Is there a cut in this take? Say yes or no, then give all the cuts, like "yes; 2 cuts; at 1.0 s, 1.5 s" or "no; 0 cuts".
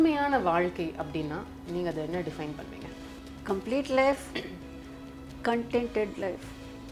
no; 0 cuts